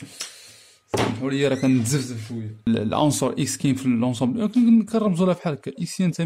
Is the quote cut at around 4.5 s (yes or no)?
no